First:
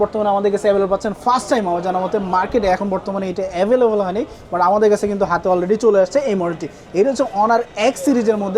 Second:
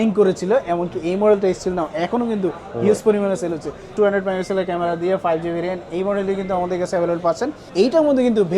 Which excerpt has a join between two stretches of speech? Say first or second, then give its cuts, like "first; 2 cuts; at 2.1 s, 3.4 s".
second; 2 cuts; at 3.9 s, 7.6 s